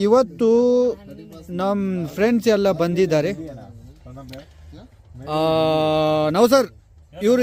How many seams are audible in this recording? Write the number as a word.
zero